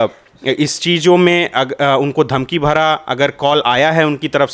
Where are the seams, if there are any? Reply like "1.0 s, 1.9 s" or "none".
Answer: none